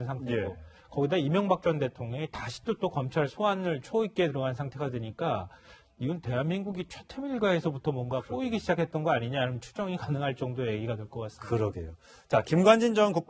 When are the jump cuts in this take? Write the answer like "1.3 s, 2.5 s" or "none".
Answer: 4.5 s